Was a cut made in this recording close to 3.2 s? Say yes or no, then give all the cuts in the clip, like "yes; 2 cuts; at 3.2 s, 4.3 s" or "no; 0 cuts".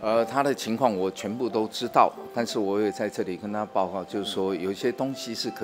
no; 0 cuts